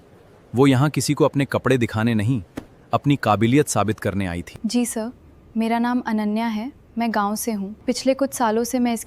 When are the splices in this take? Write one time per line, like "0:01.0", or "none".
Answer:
0:04.5
0:07.8